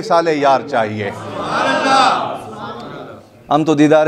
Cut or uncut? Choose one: uncut